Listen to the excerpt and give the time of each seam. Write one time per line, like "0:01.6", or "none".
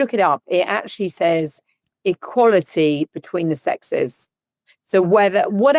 none